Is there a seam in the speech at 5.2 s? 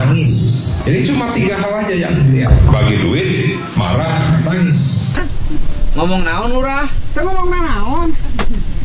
yes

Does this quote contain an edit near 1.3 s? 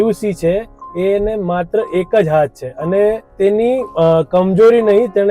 no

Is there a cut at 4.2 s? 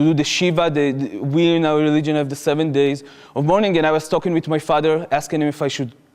yes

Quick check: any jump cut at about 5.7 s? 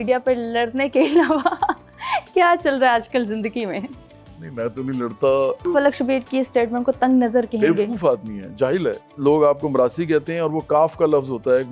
yes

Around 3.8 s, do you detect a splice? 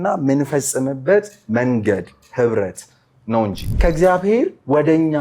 yes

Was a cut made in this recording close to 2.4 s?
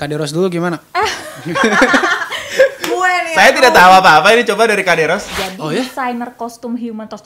no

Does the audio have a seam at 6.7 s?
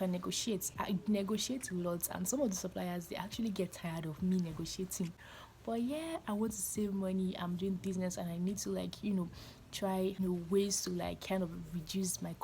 no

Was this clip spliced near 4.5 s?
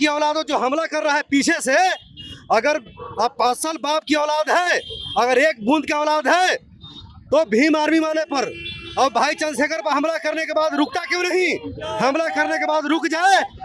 no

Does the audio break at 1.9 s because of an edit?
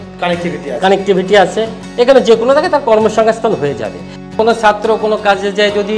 no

